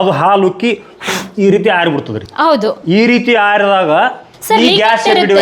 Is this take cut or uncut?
uncut